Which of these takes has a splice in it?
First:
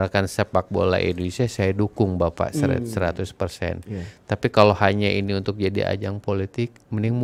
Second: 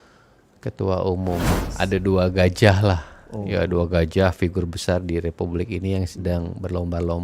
second; 1 cut; at 1.5 s

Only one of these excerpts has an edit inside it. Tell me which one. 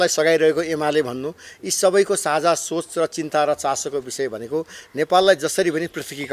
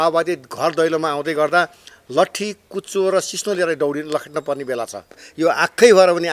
second; 1 cut; at 5.2 s

